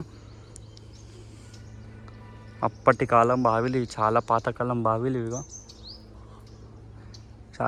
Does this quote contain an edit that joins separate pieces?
no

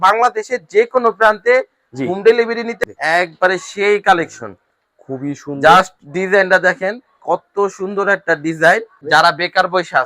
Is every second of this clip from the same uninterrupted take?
no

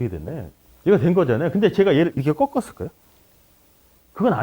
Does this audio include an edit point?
no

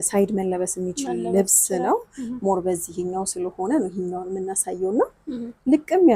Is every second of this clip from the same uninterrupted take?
yes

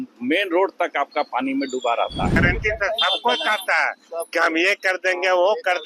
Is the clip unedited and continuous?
no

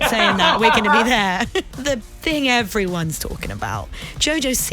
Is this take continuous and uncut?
no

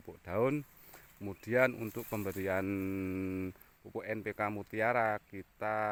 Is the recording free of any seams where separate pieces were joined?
yes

